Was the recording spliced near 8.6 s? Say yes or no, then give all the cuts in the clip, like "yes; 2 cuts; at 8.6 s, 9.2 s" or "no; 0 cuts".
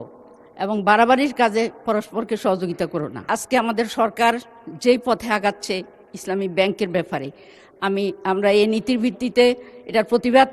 no; 1 cut; at 3.2 s